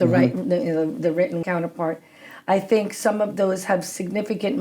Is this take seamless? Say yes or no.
no